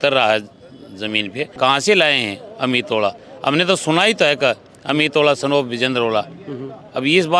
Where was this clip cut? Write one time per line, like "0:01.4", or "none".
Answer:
0:01.4